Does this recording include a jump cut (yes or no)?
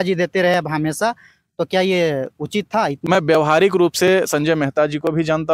yes